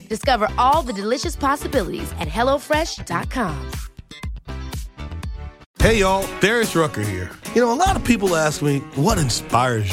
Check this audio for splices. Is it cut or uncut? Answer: cut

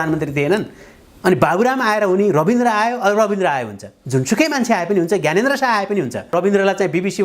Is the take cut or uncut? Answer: cut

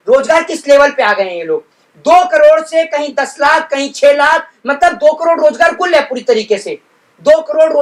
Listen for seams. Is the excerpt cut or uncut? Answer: uncut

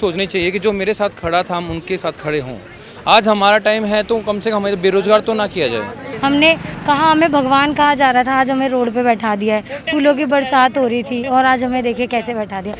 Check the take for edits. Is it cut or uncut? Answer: cut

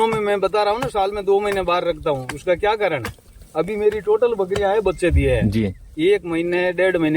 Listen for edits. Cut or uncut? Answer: uncut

